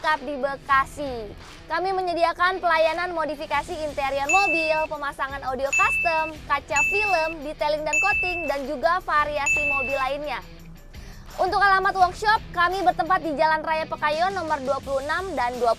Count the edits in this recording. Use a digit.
0